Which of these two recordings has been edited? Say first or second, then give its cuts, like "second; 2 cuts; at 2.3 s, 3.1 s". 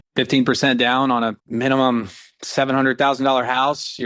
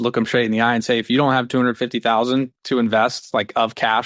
second; 1 cut; at 2.6 s